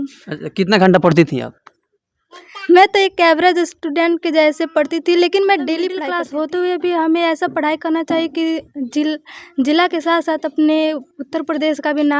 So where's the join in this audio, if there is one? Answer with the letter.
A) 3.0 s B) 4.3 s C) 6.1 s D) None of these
C